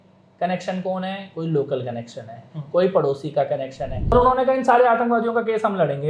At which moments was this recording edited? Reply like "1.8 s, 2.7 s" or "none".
4.1 s